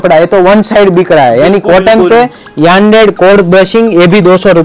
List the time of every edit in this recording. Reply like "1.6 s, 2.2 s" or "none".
none